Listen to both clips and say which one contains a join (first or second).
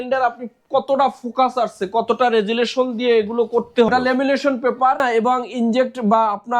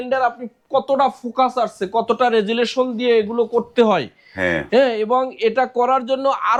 first